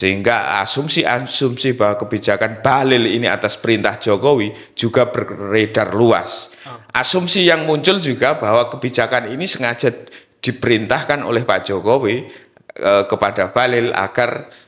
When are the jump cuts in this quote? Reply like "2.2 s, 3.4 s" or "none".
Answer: none